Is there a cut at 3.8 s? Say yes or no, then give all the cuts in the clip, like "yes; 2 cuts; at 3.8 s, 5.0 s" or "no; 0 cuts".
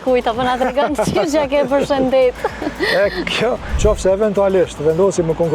yes; 1 cut; at 3.8 s